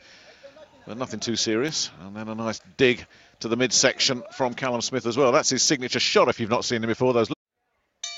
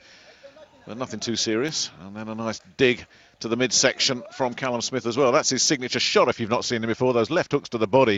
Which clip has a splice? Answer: second; 1 cut; at 7.3 s

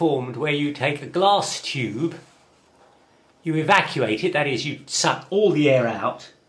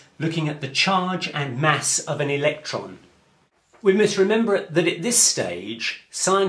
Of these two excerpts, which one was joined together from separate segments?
first; 1 cut; at 1.5 s

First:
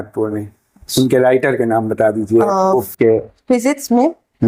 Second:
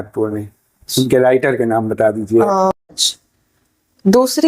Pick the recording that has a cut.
second; 1 cut; at 2.7 s

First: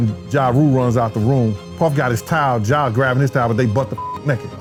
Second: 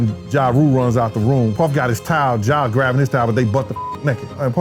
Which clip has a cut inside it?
second; 1 cut; at 1.5 s

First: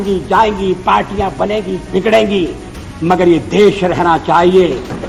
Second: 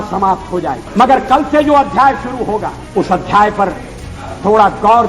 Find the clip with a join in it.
second; 2 cuts; at 0.8 s, 2.8 s

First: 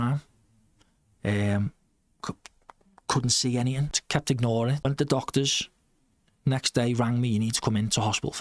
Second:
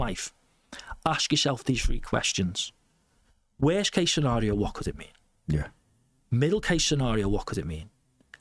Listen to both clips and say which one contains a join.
first; 2 cuts; at 4.0 s, 4.8 s

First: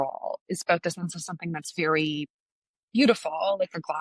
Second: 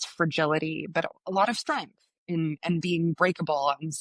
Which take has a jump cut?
second; 1 cut; at 1.1 s

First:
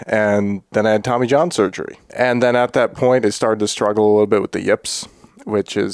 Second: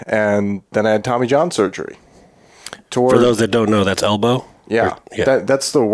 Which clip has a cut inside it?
first; 1 cut; at 2.1 s

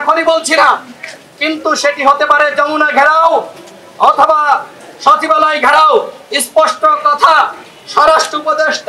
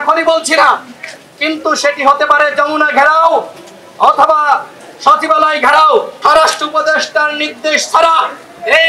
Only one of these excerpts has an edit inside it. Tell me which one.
second; 1 cut; at 6.1 s

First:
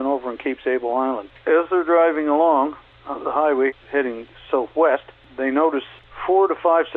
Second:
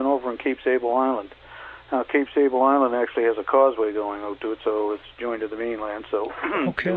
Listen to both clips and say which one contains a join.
first; 5 cuts; at 1.3 s, 2.9 s, 3.7 s, 5.2 s, 5.9 s

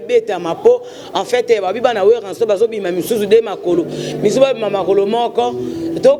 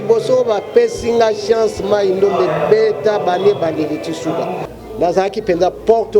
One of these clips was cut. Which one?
second; 1 cut; at 4.6 s

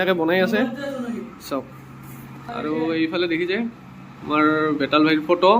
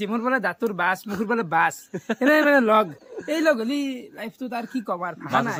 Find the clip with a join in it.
first; 1 cut; at 2.4 s

